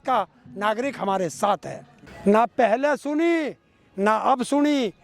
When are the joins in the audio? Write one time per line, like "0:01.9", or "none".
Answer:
0:02.0